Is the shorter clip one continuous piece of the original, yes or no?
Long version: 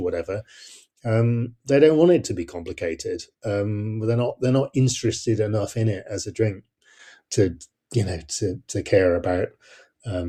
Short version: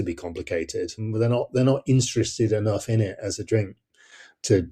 no